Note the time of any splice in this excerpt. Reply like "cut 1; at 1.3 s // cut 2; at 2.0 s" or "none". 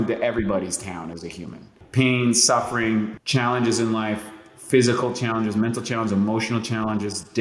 cut 1; at 1.8 s // cut 2; at 3.1 s